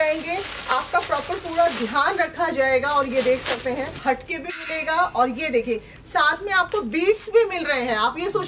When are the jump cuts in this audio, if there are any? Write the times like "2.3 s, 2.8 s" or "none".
4.0 s